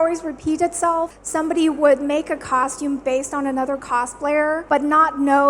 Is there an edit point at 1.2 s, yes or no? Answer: yes